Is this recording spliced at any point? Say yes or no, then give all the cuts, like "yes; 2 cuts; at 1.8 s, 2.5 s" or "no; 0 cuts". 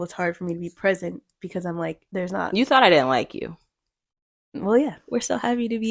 yes; 2 cuts; at 2.4 s, 5.0 s